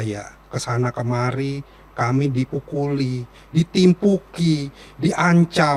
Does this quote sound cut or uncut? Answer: uncut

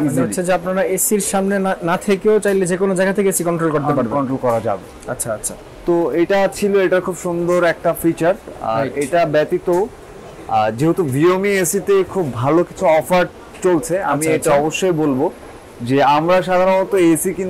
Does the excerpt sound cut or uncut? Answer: uncut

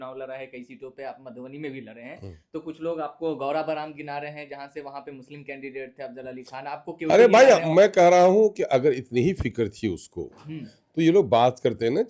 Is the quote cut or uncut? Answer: uncut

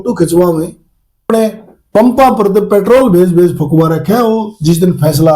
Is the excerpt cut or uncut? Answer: cut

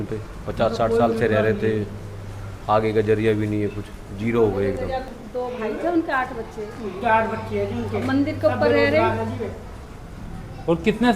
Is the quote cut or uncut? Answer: cut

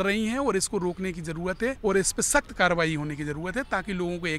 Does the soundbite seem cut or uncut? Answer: cut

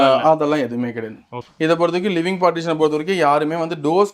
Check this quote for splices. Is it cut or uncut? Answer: cut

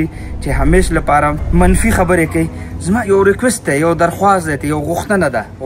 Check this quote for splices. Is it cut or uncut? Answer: cut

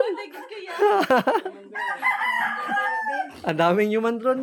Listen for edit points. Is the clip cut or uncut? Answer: uncut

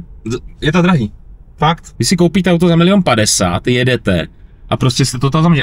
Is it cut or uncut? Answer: cut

